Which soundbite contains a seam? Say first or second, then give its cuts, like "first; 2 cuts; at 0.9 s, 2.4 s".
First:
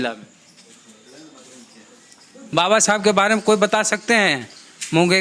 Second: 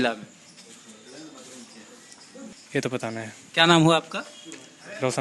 first; 1 cut; at 2.4 s